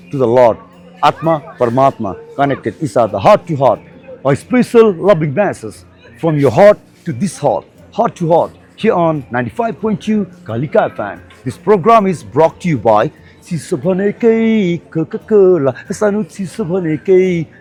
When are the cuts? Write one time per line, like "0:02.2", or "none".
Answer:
none